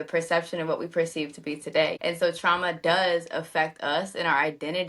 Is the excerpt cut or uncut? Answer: cut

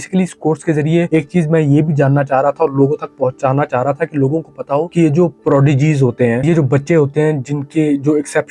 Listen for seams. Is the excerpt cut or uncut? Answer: uncut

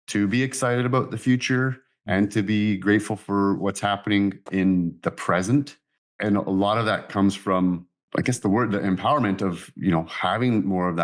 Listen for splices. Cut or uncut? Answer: uncut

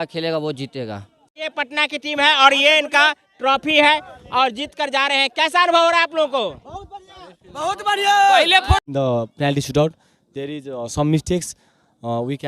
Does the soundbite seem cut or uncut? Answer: cut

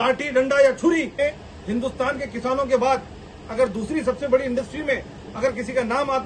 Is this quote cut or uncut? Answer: cut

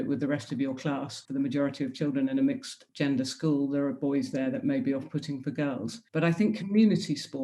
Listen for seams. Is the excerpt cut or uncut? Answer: cut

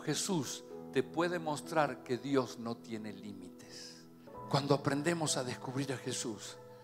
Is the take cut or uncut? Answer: cut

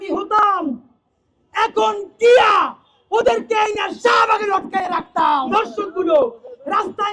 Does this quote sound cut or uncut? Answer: cut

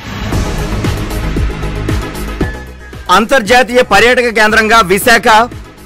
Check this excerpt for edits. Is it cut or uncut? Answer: uncut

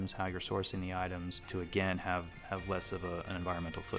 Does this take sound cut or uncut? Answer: cut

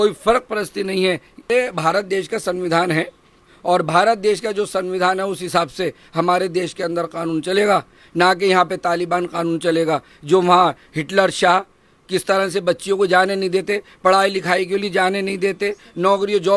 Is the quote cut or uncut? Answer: cut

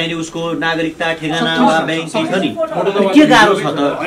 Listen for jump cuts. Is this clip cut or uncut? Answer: uncut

